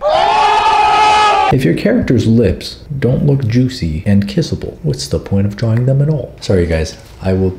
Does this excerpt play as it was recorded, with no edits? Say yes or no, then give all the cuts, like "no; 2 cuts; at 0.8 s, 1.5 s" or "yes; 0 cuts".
no; 1 cut; at 1.5 s